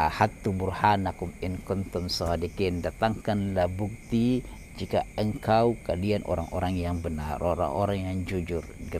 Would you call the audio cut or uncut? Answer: uncut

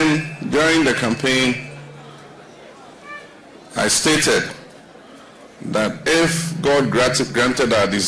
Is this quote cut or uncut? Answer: uncut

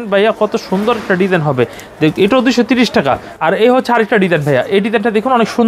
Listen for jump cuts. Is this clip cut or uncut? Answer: cut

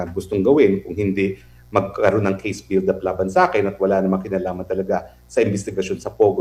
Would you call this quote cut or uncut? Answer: uncut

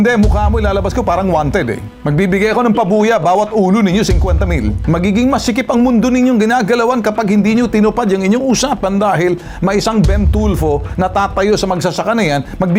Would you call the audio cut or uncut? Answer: uncut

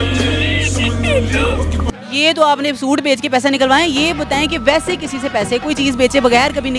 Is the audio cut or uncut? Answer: cut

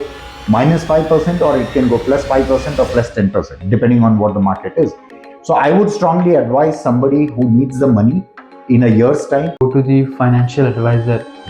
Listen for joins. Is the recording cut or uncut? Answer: cut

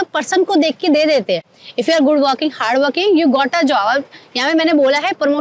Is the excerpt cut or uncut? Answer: uncut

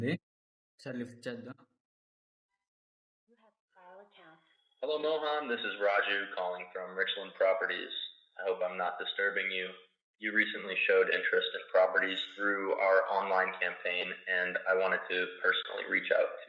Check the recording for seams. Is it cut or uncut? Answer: cut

